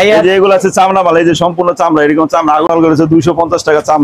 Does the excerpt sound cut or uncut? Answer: cut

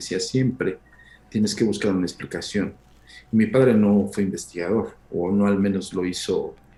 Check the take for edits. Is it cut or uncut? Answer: uncut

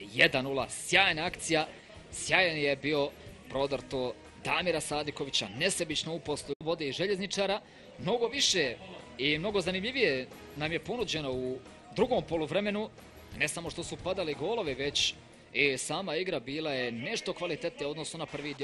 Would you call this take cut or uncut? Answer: uncut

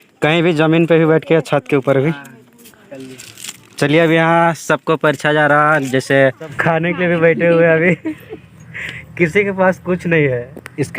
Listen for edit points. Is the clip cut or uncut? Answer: cut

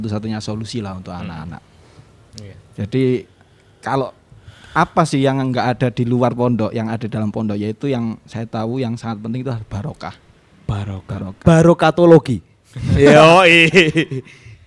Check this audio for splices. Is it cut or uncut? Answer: uncut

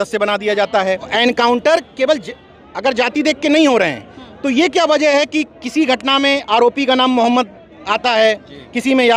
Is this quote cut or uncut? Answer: cut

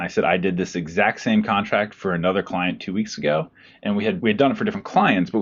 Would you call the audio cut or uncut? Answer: cut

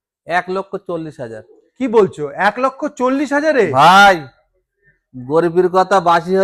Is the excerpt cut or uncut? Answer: uncut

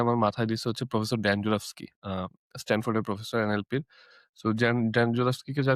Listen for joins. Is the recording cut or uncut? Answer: uncut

